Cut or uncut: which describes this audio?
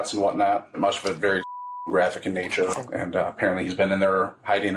cut